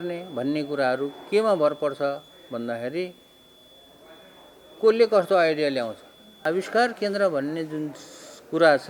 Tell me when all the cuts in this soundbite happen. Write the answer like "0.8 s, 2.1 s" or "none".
6.4 s